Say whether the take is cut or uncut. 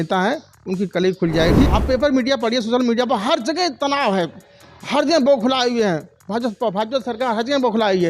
cut